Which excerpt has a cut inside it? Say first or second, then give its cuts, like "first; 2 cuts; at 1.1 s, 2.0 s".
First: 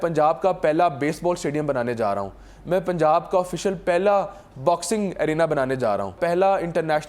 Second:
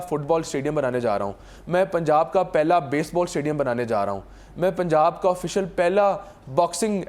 first; 1 cut; at 6.2 s